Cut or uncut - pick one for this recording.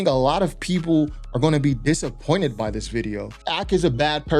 cut